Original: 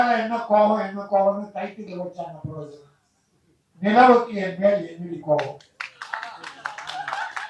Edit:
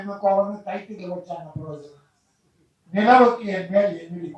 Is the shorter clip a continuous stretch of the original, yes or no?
yes